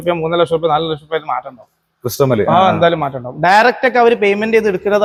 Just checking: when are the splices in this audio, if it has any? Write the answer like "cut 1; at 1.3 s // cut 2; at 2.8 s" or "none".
none